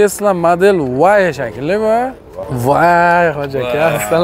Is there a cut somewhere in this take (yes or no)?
yes